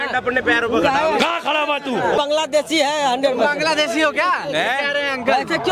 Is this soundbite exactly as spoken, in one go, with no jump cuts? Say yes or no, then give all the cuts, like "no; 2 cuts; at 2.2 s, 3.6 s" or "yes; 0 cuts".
no; 1 cut; at 2.2 s